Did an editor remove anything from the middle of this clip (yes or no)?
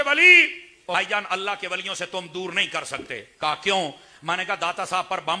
yes